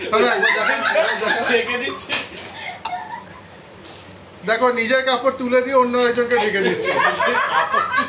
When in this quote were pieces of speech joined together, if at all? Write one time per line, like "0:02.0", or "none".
none